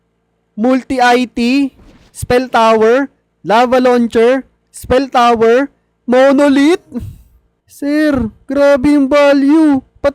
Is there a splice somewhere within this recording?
no; 0 cuts

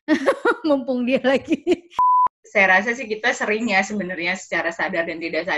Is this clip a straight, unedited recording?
no; 1 cut; at 2.0 s

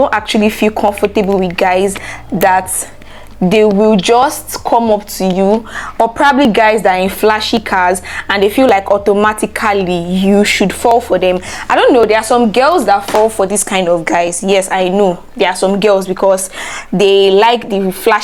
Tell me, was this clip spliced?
no; 0 cuts

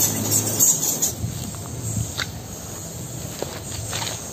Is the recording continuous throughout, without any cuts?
no; 1 cut; at 1.1 s

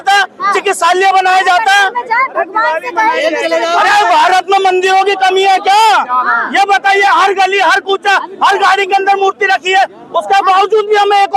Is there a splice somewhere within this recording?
no; 0 cuts

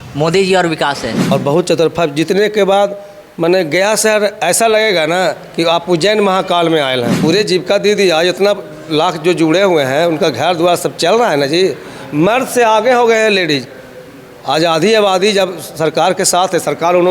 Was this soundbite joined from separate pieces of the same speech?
yes; 2 cuts; at 1.2 s, 7.1 s

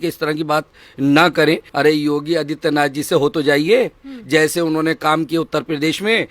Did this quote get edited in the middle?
yes; 1 cut; at 1.7 s

